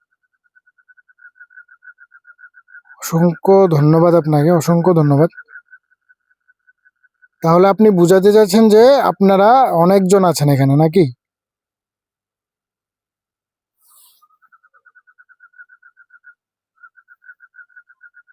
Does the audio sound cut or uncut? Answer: uncut